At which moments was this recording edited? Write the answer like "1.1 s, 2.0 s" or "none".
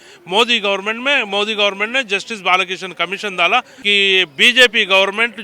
3.8 s